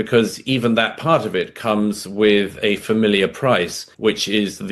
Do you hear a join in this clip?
yes; 1 cut; at 3.8 s

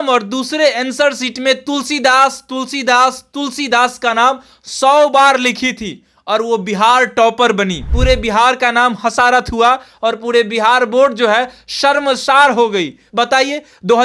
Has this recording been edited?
yes; 2 cuts; at 7.9 s, 13.0 s

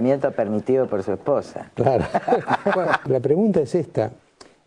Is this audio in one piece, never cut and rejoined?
no; 1 cut; at 3.0 s

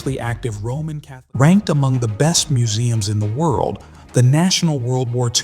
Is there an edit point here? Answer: yes; 1 cut; at 1.1 s

